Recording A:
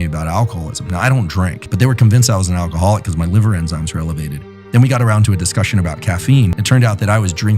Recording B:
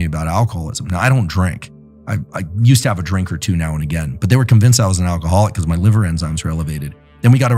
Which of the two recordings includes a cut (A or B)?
A